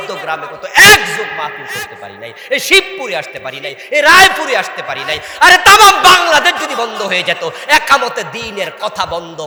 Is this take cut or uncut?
uncut